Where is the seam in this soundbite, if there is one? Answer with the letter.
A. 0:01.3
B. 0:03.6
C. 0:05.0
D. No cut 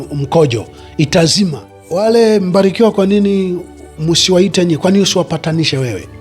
A